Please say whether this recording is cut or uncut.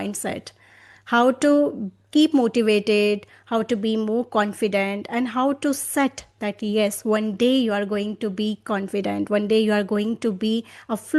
uncut